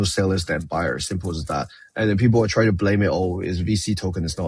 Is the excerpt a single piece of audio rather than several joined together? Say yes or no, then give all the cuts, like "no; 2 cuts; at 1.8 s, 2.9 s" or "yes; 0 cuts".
yes; 0 cuts